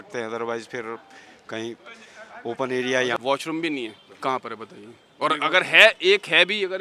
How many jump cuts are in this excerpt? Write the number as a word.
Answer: two